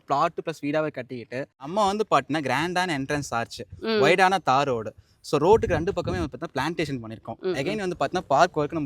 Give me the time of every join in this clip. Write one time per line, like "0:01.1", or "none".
0:01.7